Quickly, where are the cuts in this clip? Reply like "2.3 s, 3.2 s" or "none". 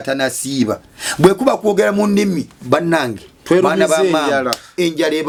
none